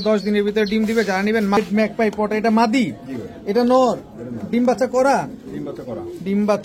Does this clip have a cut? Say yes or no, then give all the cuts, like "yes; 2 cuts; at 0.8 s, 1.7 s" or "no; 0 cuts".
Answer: yes; 1 cut; at 1.6 s